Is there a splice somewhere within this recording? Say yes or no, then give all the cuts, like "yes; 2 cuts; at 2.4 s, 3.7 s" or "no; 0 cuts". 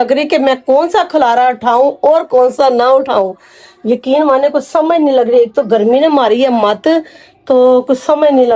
no; 0 cuts